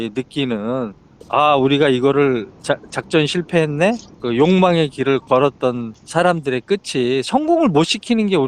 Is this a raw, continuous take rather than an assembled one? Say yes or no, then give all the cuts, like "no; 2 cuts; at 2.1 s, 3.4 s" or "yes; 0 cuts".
no; 3 cuts; at 1.1 s, 4.1 s, 5.9 s